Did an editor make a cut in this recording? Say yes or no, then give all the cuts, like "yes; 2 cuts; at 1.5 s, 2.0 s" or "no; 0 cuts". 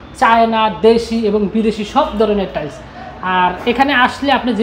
no; 0 cuts